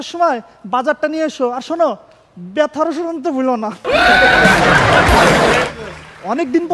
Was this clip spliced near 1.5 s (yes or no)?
no